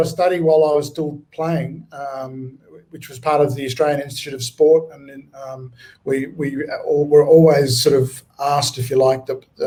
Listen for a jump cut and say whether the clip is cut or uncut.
uncut